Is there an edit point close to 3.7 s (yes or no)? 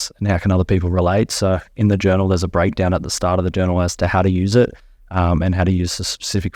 no